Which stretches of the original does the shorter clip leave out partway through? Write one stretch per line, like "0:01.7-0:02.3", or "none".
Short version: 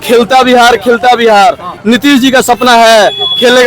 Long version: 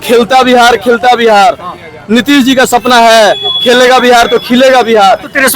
0:01.7-0:01.9